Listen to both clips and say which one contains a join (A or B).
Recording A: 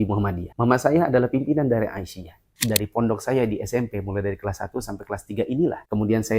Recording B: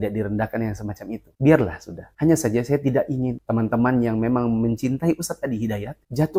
A